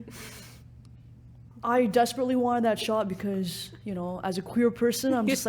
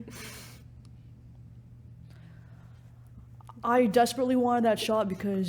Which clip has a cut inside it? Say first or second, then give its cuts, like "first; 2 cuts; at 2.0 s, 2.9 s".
first; 1 cut; at 1.5 s